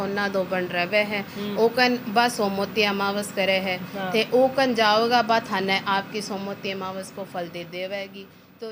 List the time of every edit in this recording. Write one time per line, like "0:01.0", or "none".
none